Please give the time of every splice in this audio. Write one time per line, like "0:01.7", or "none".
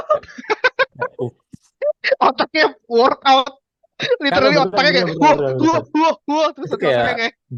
none